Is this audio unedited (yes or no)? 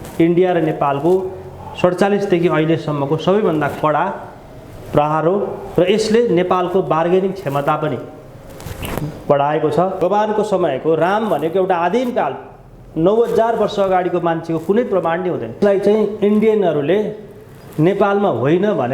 no